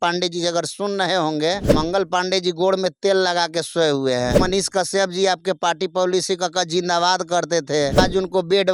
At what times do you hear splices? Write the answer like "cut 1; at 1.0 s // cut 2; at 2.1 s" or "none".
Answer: cut 1; at 1.7 s // cut 2; at 4.4 s // cut 3; at 8.0 s